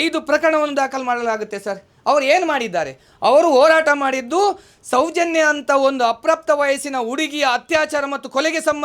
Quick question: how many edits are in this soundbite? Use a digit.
0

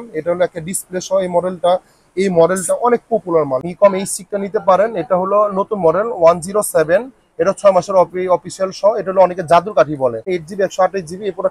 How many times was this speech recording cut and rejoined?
2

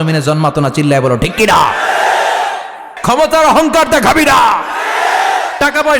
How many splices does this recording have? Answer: 1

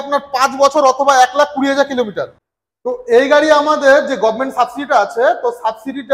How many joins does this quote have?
1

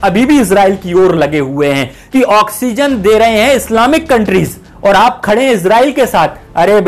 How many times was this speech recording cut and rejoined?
1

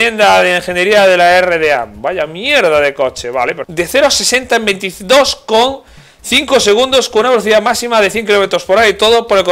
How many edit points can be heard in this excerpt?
1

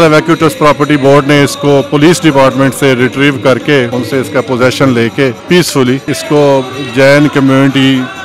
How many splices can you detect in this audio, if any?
3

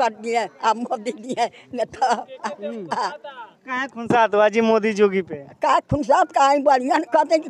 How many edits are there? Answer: 0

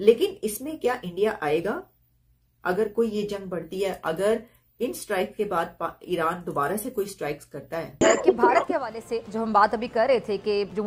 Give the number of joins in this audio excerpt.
1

